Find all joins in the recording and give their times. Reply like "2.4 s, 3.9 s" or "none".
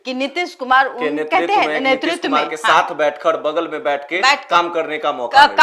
none

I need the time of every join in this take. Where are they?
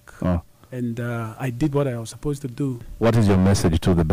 2.8 s

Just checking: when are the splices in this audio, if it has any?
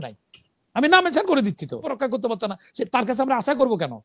2.0 s

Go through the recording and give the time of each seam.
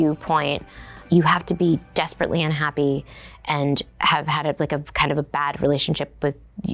0.9 s

